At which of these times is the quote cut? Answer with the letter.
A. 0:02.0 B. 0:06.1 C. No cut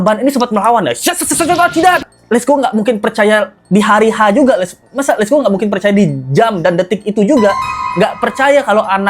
A